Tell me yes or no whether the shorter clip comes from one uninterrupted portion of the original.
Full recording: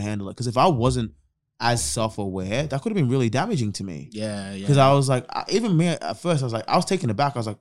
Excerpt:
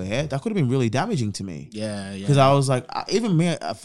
yes